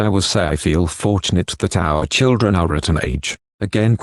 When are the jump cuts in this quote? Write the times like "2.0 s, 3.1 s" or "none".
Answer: none